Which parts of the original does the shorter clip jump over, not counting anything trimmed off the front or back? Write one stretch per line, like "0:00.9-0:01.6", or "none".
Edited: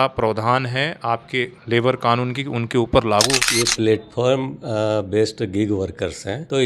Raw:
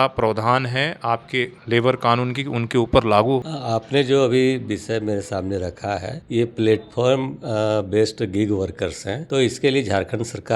0:03.4-0:06.2